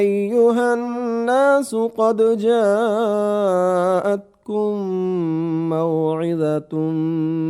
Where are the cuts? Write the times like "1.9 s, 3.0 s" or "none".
0.9 s